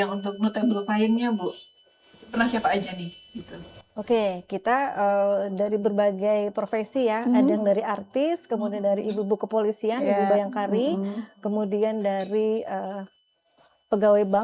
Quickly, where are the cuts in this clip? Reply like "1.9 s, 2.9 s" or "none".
none